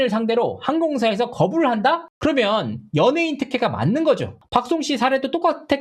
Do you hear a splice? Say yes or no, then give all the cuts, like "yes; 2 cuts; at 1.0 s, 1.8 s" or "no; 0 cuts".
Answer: yes; 1 cut; at 4.4 s